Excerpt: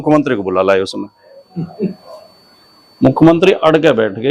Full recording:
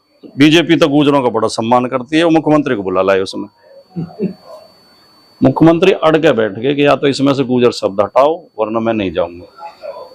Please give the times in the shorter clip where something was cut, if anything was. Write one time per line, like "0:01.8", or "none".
none